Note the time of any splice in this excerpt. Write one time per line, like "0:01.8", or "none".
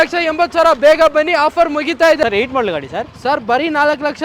0:02.2